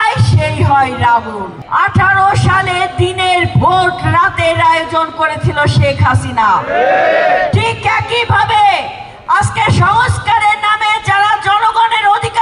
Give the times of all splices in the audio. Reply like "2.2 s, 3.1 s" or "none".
1.6 s